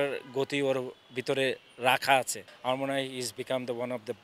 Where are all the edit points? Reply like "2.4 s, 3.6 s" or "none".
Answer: 2.4 s